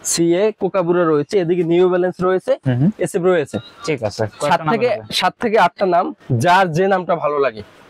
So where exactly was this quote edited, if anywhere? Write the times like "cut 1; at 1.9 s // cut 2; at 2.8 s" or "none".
none